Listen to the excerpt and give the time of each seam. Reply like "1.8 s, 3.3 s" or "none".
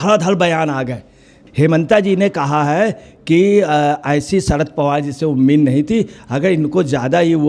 1.5 s